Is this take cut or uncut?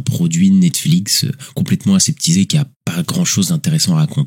cut